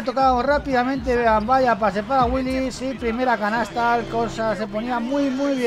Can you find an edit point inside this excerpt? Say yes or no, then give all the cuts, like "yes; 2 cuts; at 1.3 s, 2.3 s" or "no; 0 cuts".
no; 0 cuts